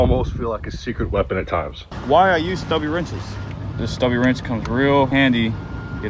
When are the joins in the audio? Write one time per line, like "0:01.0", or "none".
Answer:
0:01.8
0:03.4